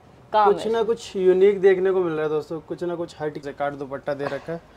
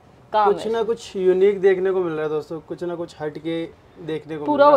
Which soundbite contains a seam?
first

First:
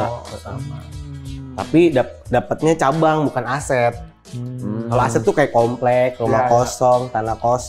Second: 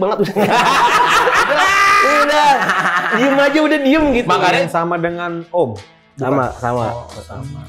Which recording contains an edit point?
second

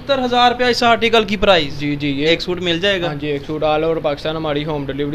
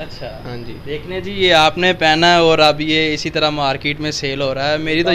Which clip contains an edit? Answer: first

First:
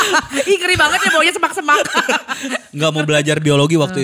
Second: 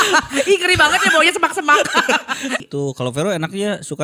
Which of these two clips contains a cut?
second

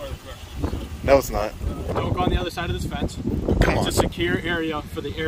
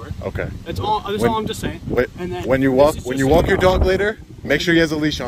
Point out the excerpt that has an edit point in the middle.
first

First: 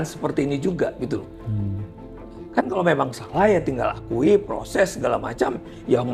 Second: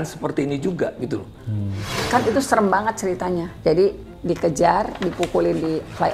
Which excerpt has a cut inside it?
second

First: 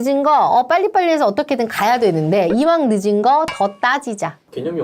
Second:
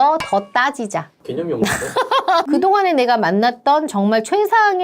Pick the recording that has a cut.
second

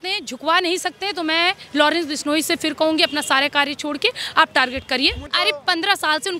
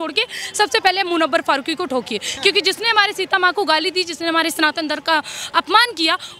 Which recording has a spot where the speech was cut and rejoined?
first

